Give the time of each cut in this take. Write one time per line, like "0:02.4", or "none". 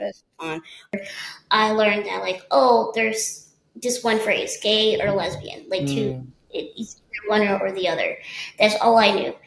0:00.9